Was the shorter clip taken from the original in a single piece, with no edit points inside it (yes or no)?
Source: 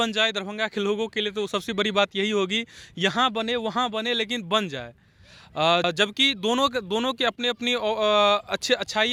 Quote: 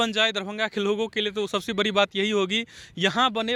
yes